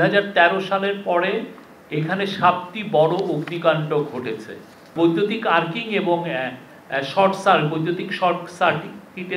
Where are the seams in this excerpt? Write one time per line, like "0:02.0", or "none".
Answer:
0:04.9